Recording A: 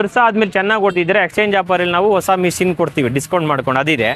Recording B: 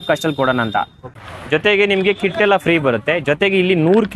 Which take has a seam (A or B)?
B